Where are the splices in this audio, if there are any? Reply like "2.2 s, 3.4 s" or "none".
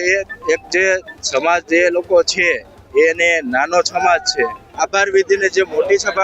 4.6 s